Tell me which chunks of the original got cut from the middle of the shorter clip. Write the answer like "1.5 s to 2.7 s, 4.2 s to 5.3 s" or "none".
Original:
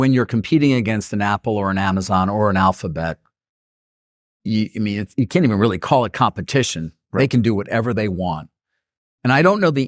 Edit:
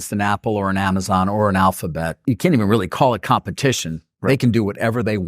3.2 s to 5.1 s